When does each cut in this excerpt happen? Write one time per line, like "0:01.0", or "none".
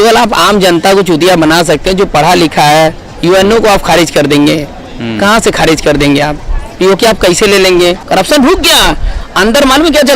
0:08.0

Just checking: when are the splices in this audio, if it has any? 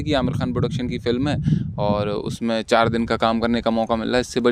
none

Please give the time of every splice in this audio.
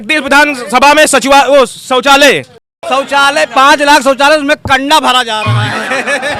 0:02.6

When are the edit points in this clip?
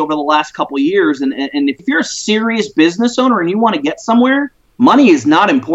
0:01.8
0:04.6

